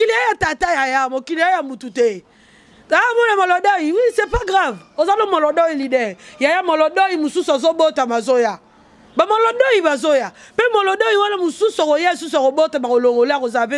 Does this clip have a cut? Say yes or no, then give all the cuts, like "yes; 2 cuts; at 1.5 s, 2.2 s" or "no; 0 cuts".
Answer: no; 0 cuts